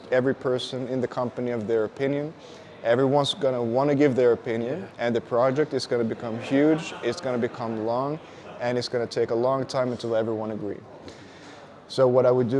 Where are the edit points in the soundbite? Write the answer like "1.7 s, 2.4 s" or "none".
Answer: none